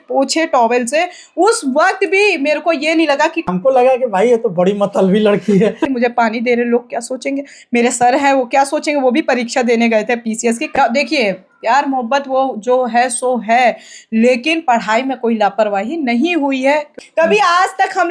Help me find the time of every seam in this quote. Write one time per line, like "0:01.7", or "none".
0:03.5
0:05.8
0:10.7
0:17.0

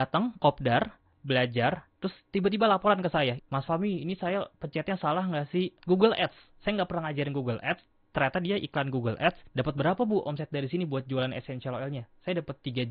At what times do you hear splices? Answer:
0:01.1
0:03.4
0:05.8
0:09.4

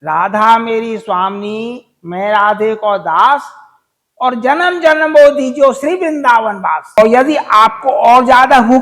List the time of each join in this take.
0:07.0

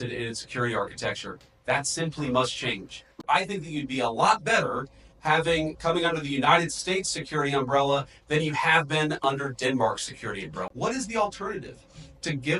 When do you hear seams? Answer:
0:03.2
0:10.7

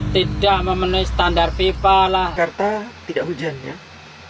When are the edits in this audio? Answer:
0:02.3

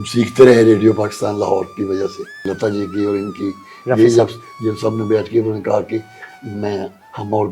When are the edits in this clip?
0:02.4

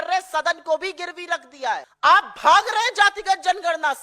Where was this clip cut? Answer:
0:01.9

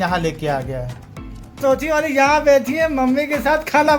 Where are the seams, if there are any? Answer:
0:01.5

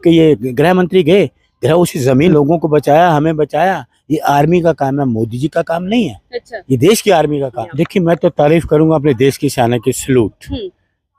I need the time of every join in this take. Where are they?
0:02.3
0:07.6

